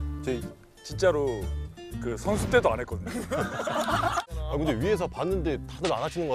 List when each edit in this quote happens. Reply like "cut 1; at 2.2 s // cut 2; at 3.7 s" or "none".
cut 1; at 4.3 s